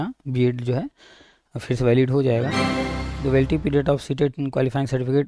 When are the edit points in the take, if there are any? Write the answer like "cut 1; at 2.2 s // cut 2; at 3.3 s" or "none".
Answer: cut 1; at 2.6 s